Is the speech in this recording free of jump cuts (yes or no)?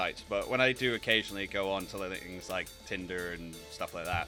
yes